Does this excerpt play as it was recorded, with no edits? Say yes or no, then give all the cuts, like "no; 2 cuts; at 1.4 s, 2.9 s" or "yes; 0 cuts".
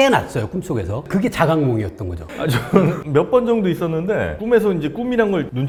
yes; 0 cuts